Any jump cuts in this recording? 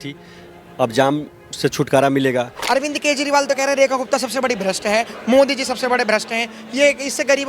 yes; 1 cut; at 2.6 s

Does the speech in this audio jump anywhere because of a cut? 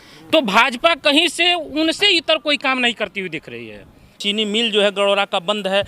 yes; 1 cut; at 4.1 s

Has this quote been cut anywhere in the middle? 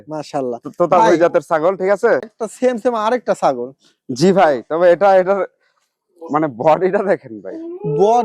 yes; 1 cut; at 2.3 s

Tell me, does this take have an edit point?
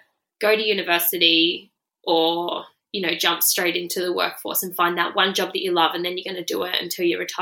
no; 0 cuts

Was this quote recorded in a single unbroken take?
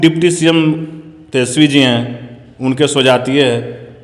yes; 0 cuts

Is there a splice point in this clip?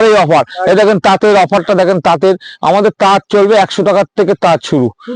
no; 0 cuts

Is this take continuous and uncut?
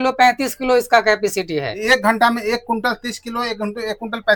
yes; 0 cuts

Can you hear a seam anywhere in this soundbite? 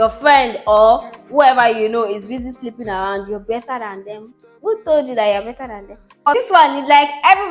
yes; 1 cut; at 6.2 s

